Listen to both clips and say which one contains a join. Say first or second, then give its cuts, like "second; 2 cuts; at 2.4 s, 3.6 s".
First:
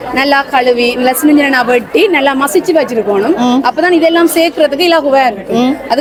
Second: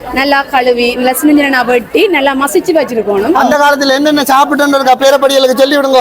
second; 1 cut; at 3.3 s